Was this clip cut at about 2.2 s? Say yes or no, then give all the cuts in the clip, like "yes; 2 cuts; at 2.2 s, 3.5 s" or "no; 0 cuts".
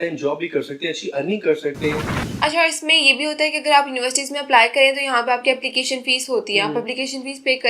yes; 1 cut; at 2.2 s